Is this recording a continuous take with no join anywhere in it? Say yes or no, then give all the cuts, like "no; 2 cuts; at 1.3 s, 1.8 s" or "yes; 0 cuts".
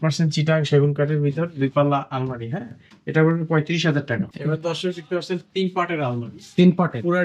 no; 1 cut; at 4.3 s